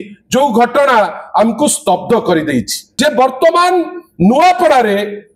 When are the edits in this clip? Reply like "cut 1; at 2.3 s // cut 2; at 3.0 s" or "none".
cut 1; at 2.8 s